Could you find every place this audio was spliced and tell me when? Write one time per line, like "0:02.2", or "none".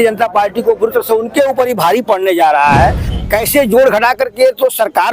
0:03.1